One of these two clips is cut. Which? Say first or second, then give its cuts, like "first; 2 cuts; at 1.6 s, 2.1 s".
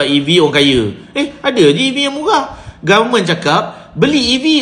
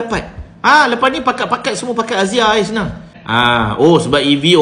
second; 1 cut; at 3.1 s